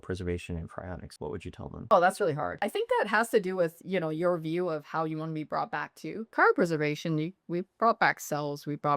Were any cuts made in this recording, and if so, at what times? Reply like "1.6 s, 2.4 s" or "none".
1.5 s, 2.6 s, 6.3 s